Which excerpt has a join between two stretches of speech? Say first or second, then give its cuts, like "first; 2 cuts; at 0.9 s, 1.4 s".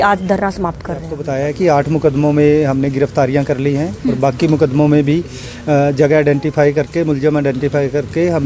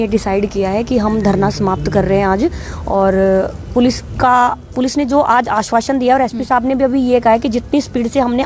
first; 1 cut; at 1.2 s